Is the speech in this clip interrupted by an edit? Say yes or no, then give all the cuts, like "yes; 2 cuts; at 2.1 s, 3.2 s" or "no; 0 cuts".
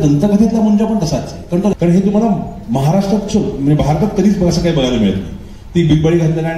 yes; 1 cut; at 1.7 s